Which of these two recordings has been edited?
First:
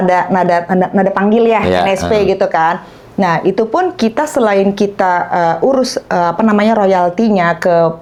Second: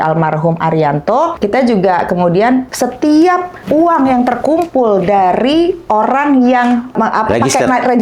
second; 4 cuts; at 1.3 s, 2.7 s, 3.6 s, 6.9 s

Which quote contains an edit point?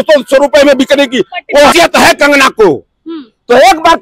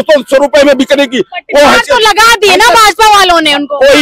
first; 1 cut; at 1.7 s

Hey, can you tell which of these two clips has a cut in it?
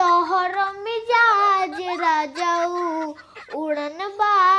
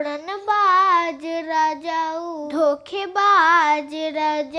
second; 1 cut; at 2.5 s

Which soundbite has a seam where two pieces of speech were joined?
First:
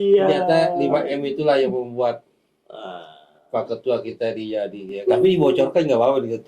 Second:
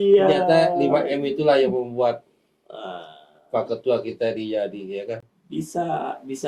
first; 1 cut; at 4.9 s

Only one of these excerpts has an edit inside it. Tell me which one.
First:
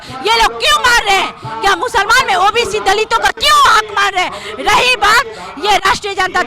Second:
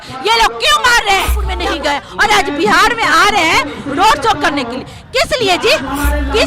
second; 1 cut; at 1.5 s

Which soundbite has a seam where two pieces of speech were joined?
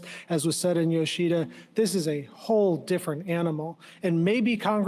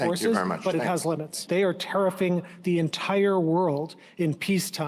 second; 1 cut; at 1.4 s

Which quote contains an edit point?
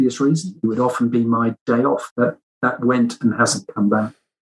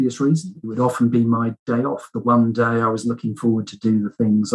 first; 1 cut; at 2.1 s

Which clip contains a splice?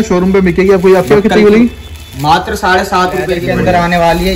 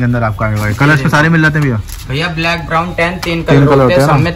first; 1 cut; at 3.4 s

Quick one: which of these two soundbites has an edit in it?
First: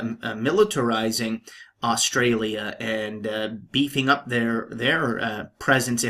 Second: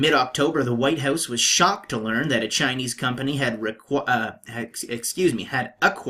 second; 1 cut; at 2.2 s

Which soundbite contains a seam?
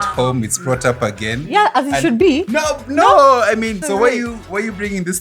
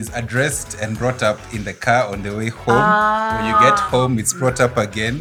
first; 1 cut; at 3.8 s

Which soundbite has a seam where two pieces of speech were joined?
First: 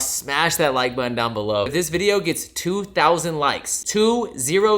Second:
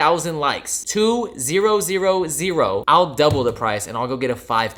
first; 1 cut; at 1.7 s

